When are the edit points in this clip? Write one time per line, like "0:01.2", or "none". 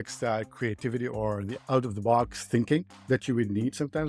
0:01.5